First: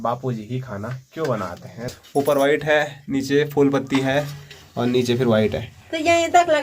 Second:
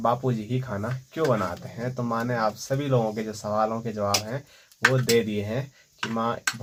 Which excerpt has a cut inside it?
first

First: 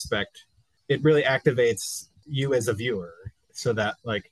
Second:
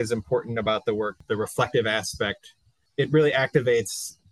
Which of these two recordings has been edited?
second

